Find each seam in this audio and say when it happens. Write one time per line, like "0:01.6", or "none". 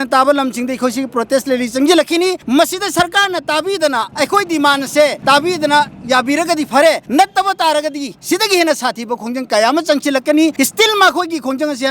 0:02.4
0:04.1
0:05.2
0:07.0
0:10.5